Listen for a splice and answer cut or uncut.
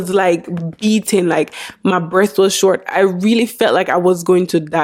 uncut